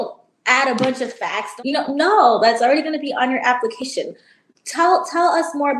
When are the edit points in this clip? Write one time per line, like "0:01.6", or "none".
0:01.5